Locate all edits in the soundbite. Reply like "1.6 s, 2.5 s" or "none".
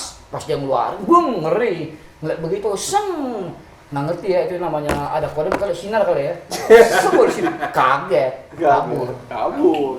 none